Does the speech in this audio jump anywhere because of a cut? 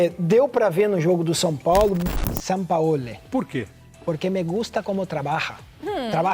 yes; 1 cut; at 2.0 s

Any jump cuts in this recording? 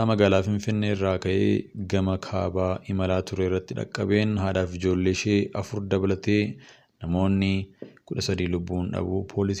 no; 0 cuts

